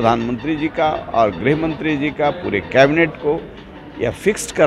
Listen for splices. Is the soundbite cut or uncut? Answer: uncut